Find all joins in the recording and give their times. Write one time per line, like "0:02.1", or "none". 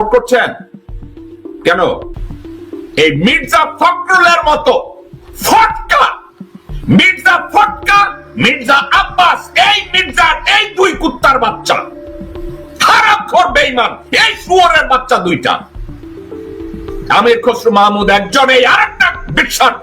0:02.1